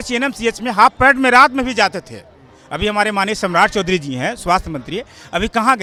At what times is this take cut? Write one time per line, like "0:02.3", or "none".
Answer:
none